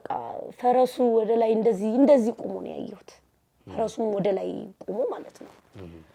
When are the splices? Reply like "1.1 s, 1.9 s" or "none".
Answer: none